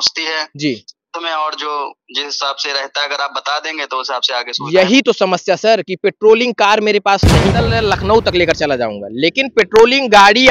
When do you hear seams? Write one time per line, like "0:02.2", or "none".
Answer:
0:07.7